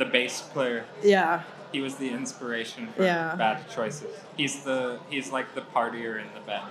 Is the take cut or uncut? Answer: uncut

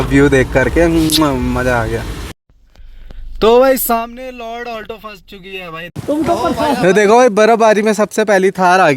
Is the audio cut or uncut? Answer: cut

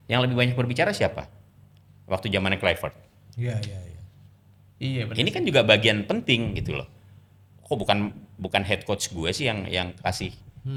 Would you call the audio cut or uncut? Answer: uncut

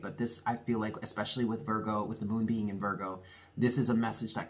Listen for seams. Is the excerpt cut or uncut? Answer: uncut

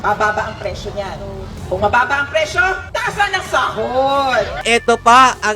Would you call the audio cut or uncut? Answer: cut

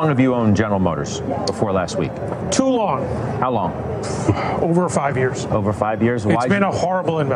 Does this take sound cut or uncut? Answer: uncut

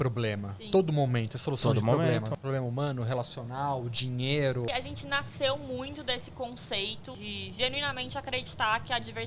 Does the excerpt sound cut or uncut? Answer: cut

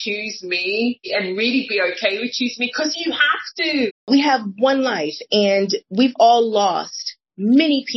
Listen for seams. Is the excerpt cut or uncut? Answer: cut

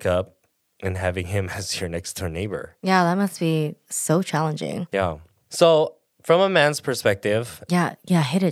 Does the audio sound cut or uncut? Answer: cut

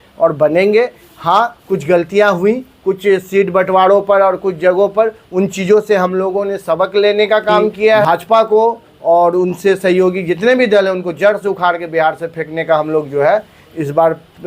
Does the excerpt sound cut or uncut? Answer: cut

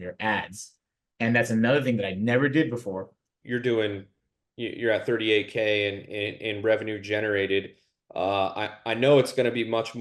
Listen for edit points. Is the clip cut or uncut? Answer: cut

